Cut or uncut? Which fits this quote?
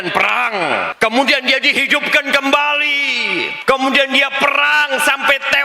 cut